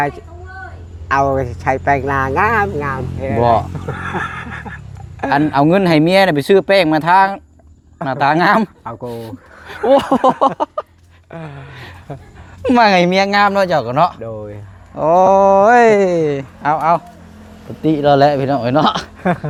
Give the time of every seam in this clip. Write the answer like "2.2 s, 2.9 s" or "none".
none